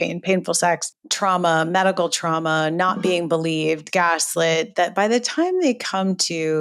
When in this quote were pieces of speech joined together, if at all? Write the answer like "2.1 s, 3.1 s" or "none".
none